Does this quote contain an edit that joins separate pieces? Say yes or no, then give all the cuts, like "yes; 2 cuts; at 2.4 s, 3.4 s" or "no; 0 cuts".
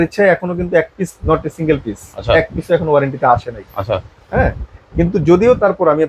no; 0 cuts